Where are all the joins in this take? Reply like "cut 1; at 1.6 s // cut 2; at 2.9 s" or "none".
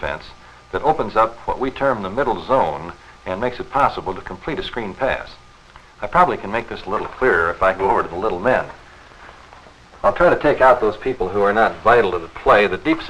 cut 1; at 2.7 s